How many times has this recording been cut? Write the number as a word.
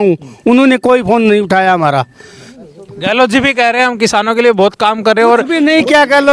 one